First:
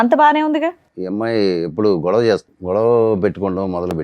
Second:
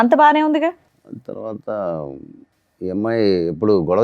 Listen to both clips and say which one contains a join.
first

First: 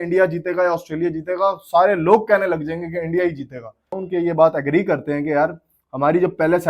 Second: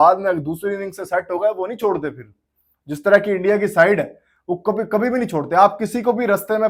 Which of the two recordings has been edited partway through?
first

